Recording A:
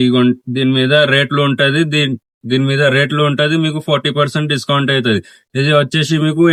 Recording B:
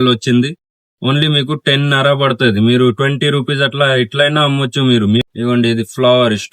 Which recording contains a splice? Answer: B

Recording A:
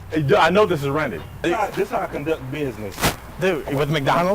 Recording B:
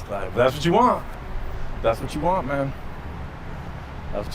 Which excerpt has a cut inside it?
A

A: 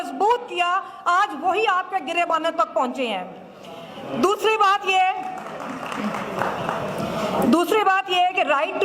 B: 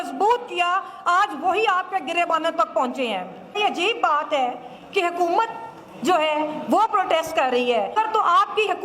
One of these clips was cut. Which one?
B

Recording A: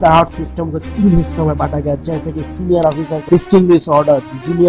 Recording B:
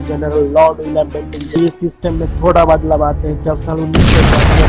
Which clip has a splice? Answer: B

